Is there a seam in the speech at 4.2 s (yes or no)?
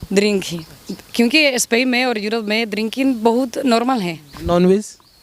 yes